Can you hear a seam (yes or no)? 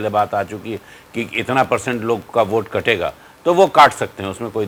no